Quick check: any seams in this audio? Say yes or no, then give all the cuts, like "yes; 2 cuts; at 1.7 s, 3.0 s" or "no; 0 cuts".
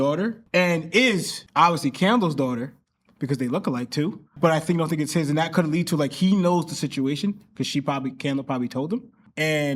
no; 0 cuts